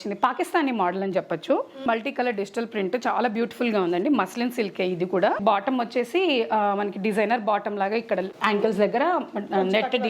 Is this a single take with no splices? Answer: no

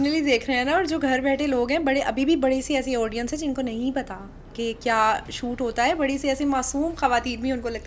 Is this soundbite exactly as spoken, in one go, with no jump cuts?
yes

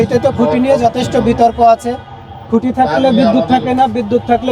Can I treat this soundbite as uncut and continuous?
yes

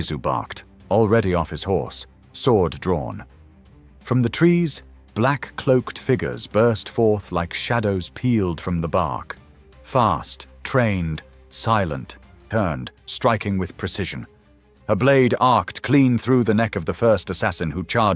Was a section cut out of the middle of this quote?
yes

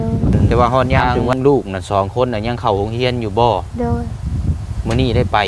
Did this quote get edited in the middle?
yes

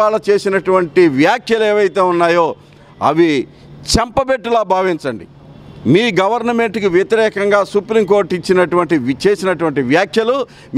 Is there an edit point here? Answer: no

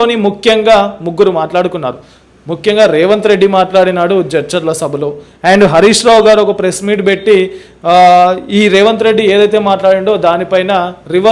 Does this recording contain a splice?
no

